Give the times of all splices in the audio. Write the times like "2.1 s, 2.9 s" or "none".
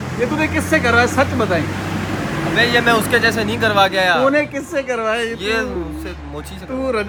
none